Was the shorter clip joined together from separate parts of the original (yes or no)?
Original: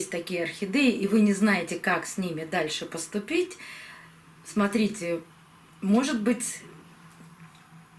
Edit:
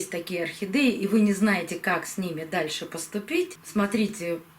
yes